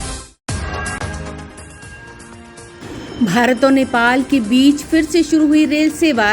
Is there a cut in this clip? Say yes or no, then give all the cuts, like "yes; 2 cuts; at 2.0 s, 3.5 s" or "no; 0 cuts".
yes; 1 cut; at 1.8 s